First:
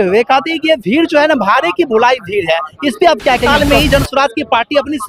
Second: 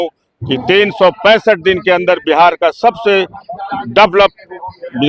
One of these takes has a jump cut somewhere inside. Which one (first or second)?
first